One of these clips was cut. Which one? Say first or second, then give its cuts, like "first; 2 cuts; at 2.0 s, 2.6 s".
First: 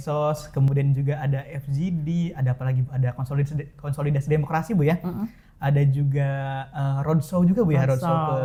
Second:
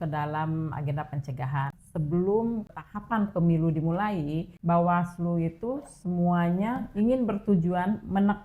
second; 4 cuts; at 1.8 s, 2.8 s, 4.5 s, 6.9 s